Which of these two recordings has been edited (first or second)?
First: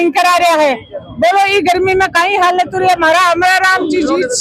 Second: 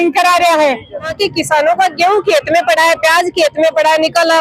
second